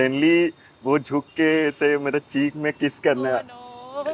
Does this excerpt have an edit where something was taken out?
no; 0 cuts

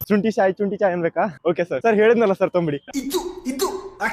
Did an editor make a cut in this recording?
yes; 2 cuts; at 1.8 s, 2.8 s

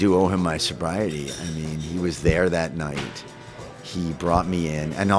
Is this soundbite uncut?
yes; 0 cuts

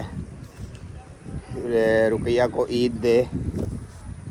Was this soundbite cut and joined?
no; 0 cuts

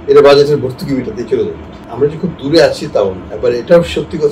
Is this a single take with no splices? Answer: no; 2 cuts; at 1.8 s, 3.2 s

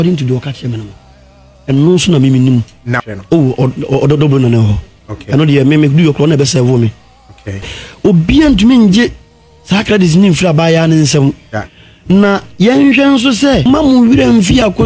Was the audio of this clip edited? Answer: yes; 3 cuts; at 3.0 s, 7.6 s, 13.6 s

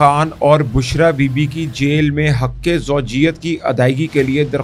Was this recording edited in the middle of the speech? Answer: no; 0 cuts

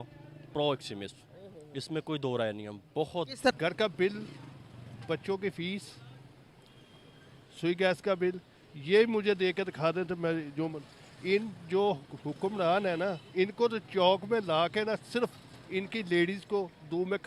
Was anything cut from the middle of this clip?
yes; 1 cut; at 3.5 s

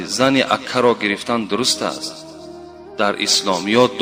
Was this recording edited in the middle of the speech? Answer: no; 0 cuts

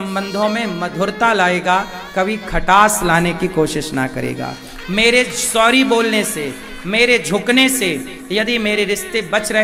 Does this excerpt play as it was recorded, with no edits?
yes; 0 cuts

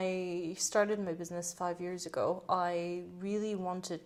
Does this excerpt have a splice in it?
no; 0 cuts

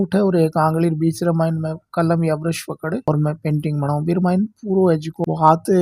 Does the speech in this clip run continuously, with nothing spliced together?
yes; 0 cuts

